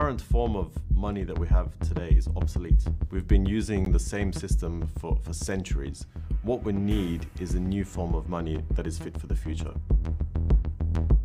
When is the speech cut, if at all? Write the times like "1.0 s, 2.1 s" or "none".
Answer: 10.2 s